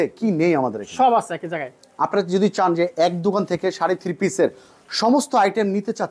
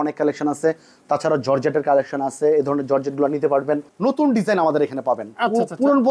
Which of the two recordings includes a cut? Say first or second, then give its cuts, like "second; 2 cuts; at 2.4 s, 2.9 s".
second; 1 cut; at 3.8 s